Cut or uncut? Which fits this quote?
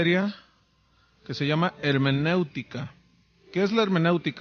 uncut